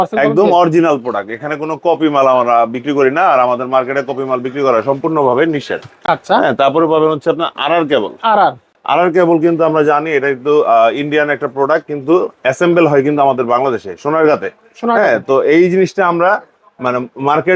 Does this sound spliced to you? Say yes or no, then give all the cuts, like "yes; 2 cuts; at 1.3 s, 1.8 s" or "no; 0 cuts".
no; 0 cuts